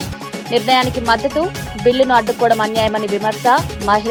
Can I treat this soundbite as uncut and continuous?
yes; 0 cuts

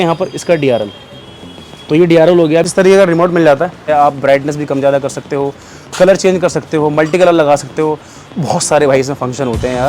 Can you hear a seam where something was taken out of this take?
yes; 2 cuts; at 2.7 s, 3.8 s

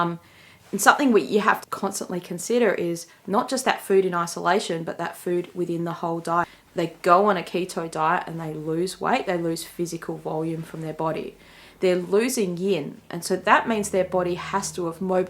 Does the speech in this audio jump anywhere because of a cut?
yes; 2 cuts; at 1.6 s, 6.6 s

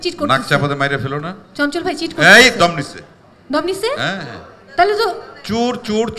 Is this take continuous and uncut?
yes; 0 cuts

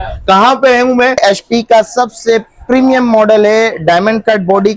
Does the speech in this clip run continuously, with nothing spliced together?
no; 1 cut; at 1.2 s

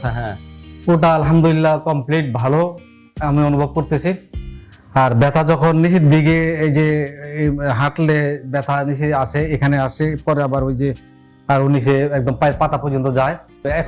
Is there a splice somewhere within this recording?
no; 0 cuts

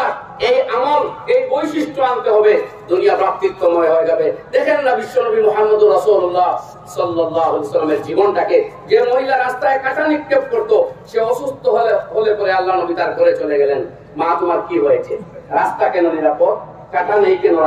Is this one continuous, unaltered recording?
yes; 0 cuts

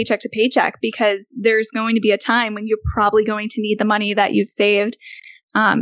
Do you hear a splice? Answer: no; 0 cuts

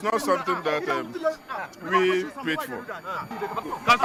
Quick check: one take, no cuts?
yes; 0 cuts

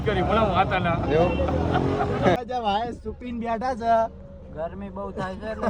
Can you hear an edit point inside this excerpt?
yes; 1 cut; at 2.4 s

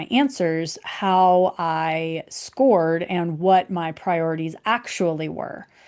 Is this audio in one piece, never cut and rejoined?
yes; 0 cuts

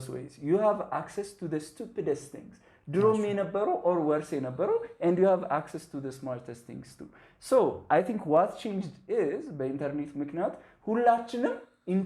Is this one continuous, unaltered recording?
yes; 0 cuts

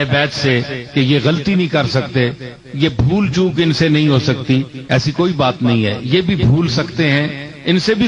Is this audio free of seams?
yes; 0 cuts

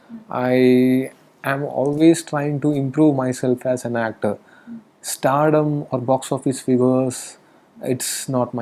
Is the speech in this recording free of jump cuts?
yes; 0 cuts

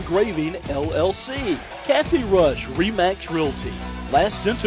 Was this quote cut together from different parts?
yes; 1 cut; at 1.7 s

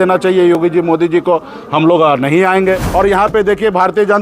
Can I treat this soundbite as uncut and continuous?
no; 1 cut; at 2.9 s

